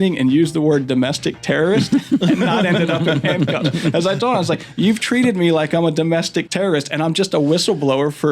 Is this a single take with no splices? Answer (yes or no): no